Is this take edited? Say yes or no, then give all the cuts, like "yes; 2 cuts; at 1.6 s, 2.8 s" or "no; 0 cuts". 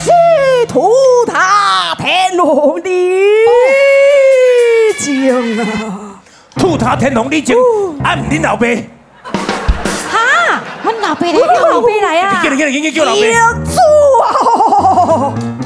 no; 0 cuts